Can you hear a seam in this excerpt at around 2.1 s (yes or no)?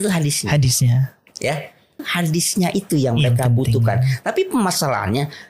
yes